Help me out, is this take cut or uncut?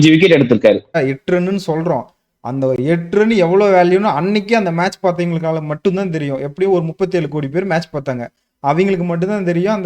cut